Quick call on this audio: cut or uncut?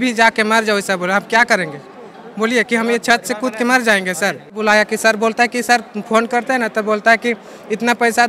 cut